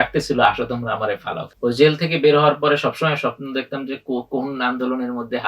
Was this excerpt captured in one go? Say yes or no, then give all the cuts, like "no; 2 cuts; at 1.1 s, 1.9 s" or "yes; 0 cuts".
no; 1 cut; at 1.4 s